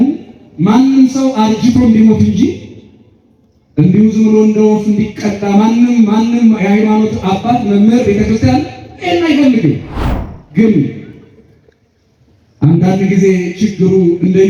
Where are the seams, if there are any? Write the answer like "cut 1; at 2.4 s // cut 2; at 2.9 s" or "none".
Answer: none